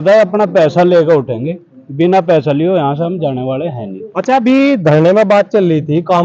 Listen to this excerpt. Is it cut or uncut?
uncut